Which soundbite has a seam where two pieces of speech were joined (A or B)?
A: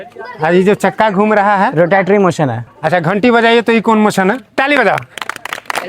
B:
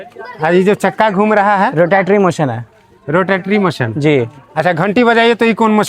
A